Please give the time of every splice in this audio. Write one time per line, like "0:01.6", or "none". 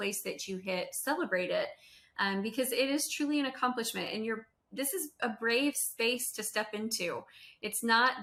none